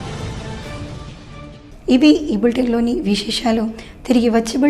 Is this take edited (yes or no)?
no